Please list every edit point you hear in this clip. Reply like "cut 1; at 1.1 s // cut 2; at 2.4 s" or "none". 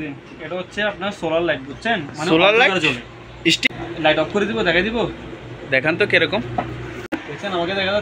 cut 1; at 3.6 s // cut 2; at 7.1 s